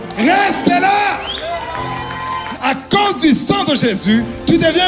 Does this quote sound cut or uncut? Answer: cut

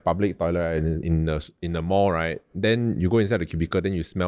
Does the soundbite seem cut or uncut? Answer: uncut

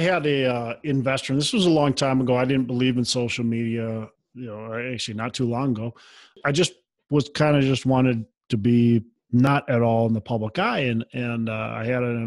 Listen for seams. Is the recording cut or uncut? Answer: cut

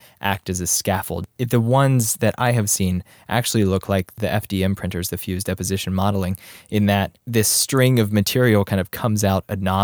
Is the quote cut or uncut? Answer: cut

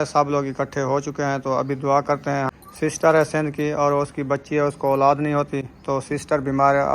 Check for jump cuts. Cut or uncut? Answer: cut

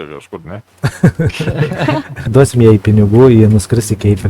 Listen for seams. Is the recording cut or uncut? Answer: cut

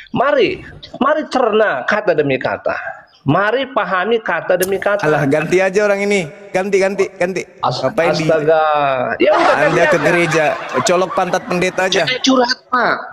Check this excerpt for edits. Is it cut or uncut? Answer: uncut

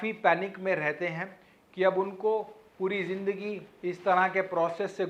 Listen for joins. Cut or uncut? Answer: uncut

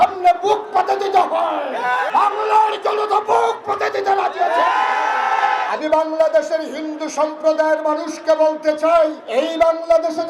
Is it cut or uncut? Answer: cut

